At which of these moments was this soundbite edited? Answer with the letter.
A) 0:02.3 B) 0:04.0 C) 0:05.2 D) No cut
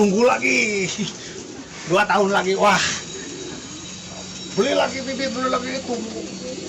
D